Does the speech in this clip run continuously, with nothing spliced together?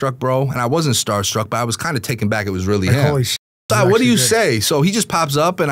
yes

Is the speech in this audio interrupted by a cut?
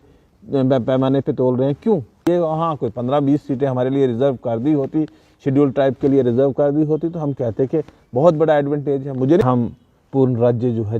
yes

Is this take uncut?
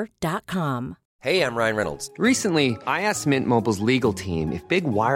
no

